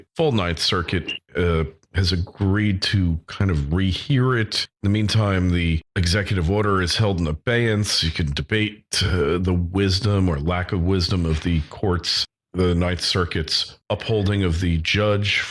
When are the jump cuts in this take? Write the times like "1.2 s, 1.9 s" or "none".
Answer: none